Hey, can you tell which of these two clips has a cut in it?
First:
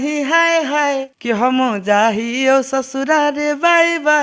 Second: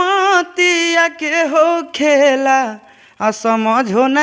first; 1 cut; at 1.1 s

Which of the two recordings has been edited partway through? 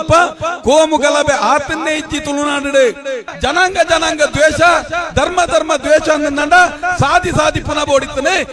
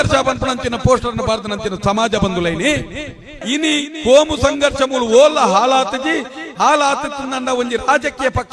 first; 1 cut; at 3.3 s

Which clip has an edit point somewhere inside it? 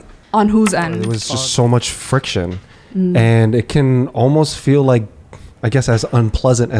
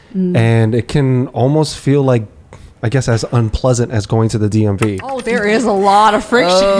first; 1 cut; at 1.2 s

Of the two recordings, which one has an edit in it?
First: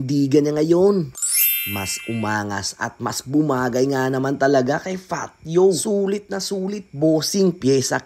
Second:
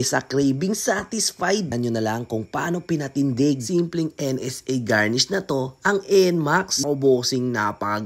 second; 2 cuts; at 1.7 s, 6.8 s

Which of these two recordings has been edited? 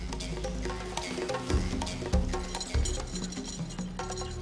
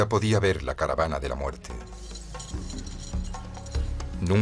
first; 1 cut; at 2.3 s

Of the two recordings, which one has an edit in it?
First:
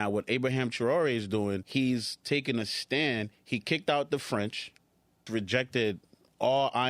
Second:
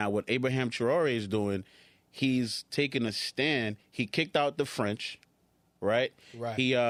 first; 2 cuts; at 1.6 s, 5.3 s

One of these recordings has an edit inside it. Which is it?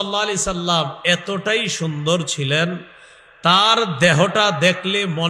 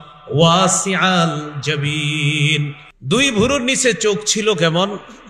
second; 1 cut; at 2.9 s

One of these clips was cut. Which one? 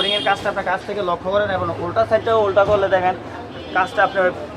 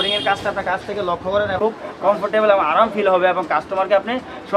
second; 1 cut; at 1.5 s

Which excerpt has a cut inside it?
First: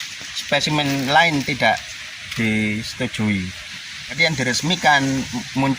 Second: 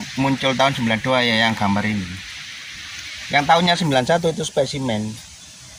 first; 1 cut; at 4.2 s

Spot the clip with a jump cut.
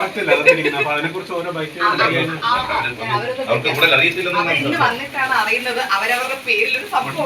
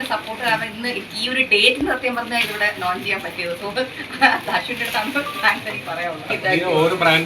second; 1 cut; at 6.3 s

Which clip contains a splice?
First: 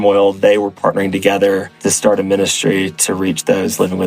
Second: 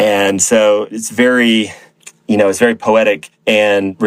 first; 1 cut; at 1.7 s

